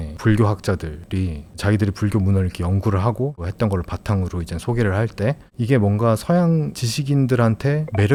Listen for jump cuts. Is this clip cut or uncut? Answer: uncut